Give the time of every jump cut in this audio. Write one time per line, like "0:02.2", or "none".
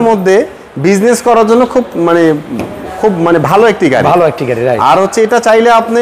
none